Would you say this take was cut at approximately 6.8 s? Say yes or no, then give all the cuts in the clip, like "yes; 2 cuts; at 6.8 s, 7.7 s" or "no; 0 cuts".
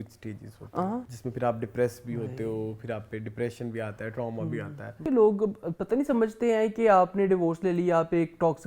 no; 2 cuts; at 1.2 s, 4.9 s